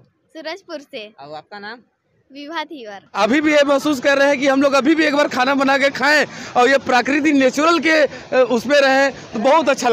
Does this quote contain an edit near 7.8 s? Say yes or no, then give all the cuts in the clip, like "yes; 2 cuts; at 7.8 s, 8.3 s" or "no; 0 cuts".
no; 1 cut; at 3.0 s